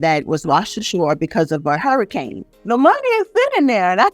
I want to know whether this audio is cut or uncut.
cut